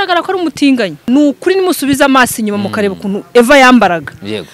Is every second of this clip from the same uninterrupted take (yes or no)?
no